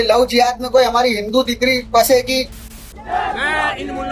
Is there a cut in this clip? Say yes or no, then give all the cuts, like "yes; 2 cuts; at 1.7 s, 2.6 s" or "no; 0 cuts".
yes; 1 cut; at 2.6 s